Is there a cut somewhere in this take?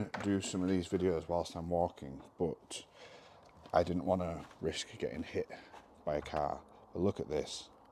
no; 0 cuts

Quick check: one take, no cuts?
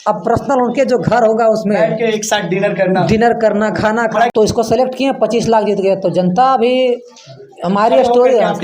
no; 1 cut; at 4.3 s

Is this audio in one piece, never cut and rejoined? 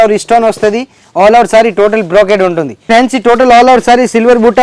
no; 1 cut; at 2.8 s

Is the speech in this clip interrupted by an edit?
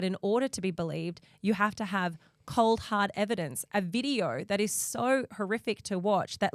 no; 0 cuts

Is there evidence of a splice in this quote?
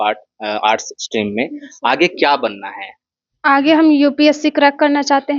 no; 0 cuts

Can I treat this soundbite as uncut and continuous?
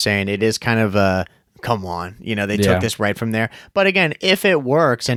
yes; 0 cuts

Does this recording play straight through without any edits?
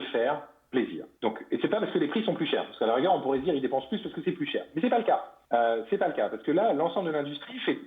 no; 2 cuts; at 1.0 s, 5.3 s

